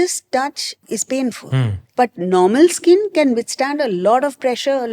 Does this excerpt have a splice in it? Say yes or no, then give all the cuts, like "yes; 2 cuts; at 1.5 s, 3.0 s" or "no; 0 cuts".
yes; 2 cuts; at 0.8 s, 1.8 s